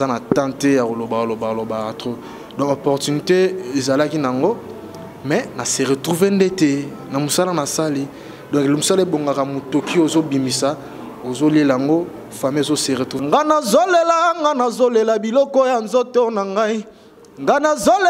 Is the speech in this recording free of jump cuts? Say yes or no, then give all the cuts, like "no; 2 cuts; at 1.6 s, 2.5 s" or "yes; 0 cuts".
no; 1 cut; at 13.2 s